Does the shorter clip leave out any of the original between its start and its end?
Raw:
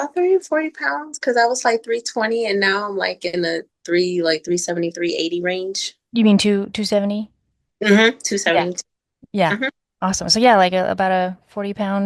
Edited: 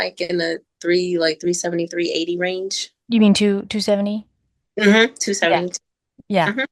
no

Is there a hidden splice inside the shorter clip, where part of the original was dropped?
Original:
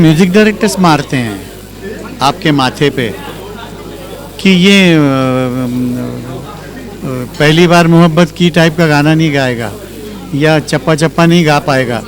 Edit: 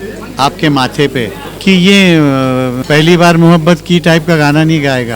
yes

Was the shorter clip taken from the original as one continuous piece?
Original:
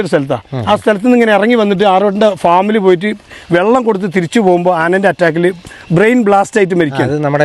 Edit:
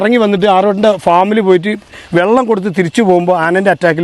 yes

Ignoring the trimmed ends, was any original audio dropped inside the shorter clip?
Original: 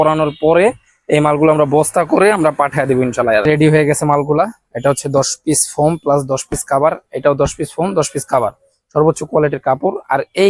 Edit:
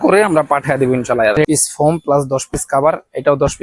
yes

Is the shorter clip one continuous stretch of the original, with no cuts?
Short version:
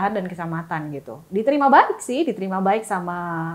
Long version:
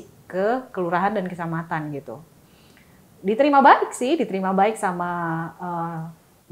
no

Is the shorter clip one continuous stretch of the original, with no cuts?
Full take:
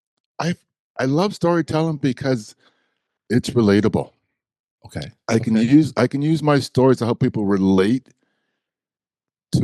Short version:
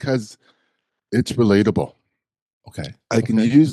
yes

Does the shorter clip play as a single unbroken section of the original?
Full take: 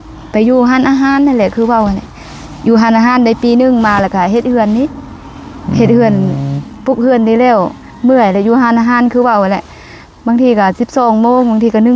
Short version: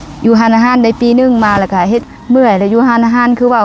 no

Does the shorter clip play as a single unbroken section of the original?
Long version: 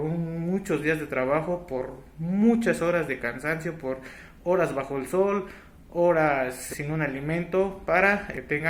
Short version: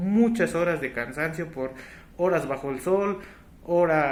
yes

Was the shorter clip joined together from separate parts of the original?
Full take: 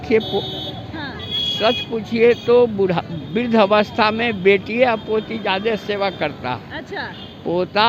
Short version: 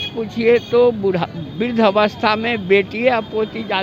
no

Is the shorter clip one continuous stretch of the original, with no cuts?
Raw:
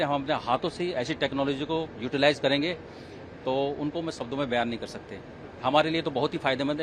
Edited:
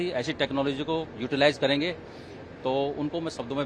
yes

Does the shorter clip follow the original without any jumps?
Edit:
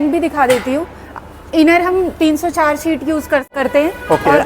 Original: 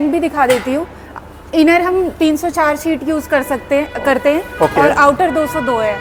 no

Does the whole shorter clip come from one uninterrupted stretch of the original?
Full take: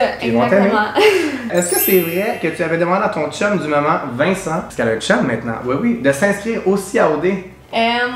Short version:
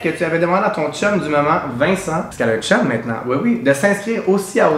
yes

